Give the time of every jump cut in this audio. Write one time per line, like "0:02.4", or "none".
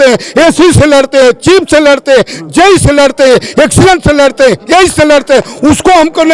none